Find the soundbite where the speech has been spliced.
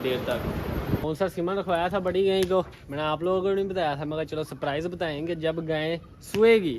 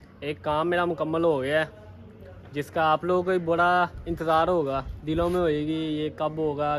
first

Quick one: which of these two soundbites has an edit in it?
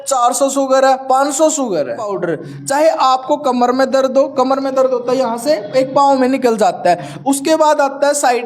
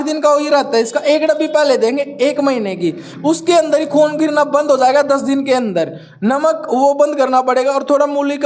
first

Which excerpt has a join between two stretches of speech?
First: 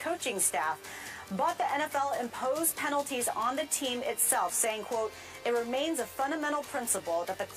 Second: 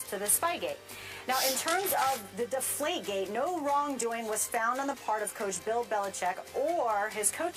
first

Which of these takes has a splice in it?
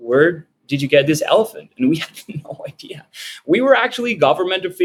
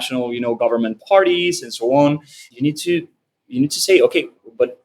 second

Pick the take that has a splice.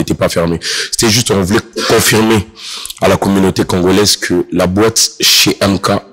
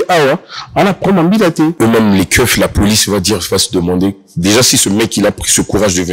second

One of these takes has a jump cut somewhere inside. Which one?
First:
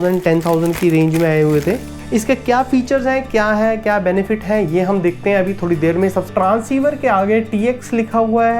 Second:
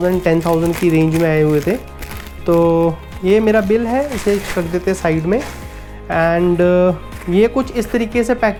first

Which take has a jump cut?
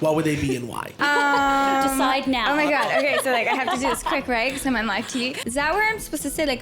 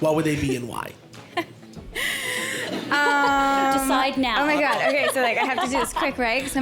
first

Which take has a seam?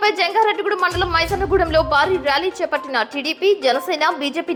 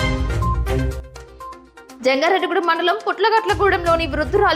second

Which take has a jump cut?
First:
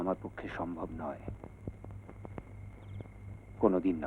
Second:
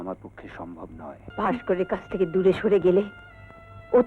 second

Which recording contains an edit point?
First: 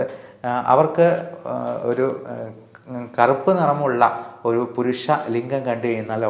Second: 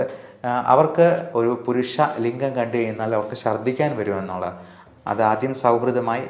second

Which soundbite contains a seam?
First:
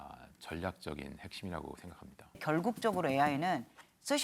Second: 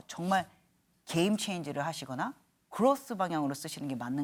first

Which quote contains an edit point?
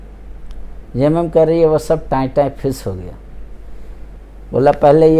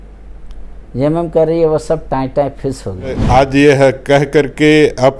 second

